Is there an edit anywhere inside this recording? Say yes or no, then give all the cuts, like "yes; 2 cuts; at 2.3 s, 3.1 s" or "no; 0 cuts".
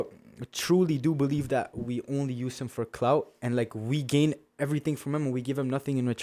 no; 0 cuts